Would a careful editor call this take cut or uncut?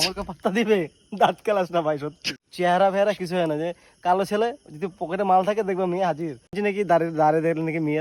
cut